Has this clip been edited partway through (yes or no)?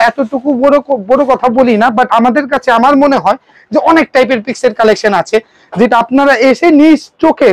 no